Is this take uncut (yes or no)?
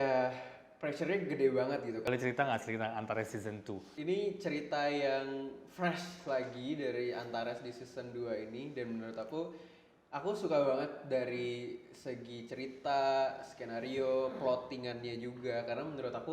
no